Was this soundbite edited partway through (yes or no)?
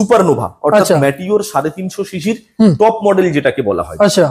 no